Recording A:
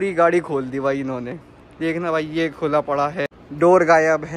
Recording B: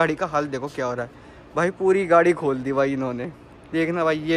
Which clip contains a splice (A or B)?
A